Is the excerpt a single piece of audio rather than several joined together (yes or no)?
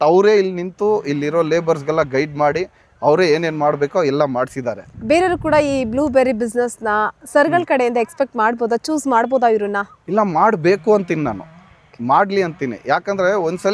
yes